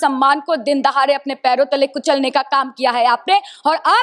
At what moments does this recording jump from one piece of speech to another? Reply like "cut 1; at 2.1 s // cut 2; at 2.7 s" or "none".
none